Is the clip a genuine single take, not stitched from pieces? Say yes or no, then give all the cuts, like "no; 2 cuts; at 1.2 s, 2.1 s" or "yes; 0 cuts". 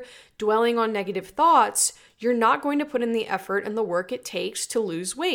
yes; 0 cuts